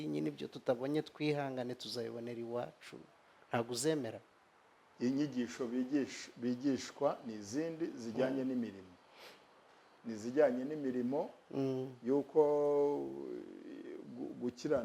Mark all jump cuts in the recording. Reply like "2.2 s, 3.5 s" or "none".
4.9 s